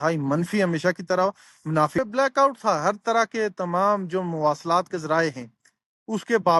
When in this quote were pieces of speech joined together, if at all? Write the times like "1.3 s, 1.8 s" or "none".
2.0 s